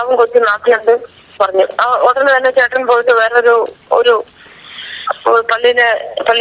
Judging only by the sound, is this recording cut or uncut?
cut